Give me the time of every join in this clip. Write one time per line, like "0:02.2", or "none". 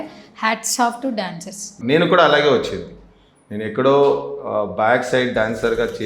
0:01.8

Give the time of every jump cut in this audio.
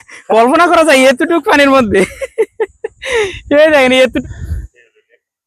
0:04.2

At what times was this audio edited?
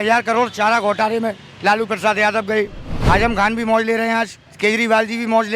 0:02.9
0:04.4

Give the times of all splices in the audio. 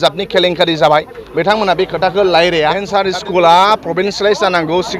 0:02.9

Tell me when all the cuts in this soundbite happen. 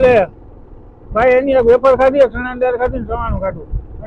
none

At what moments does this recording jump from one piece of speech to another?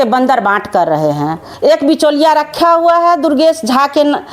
0:01.4

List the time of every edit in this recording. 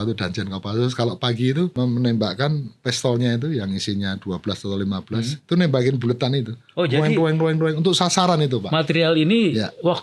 0:01.7
0:02.7

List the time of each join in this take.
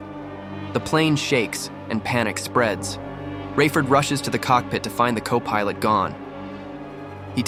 none

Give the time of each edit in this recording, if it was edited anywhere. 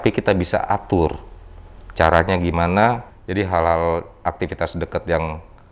0:03.1

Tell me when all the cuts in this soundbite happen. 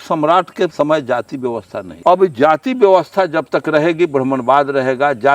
0:00.7
0:01.8

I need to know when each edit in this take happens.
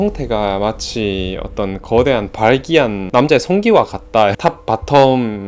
0:04.4

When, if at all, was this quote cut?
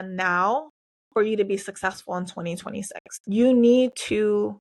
0:03.0

